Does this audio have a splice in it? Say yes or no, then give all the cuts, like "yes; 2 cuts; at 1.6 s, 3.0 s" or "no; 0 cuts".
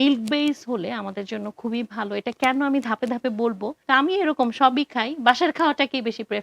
yes; 1 cut; at 3.7 s